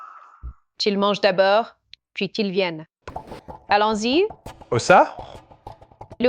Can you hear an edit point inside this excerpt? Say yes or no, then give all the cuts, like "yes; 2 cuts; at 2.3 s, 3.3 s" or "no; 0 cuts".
yes; 1 cut; at 3.0 s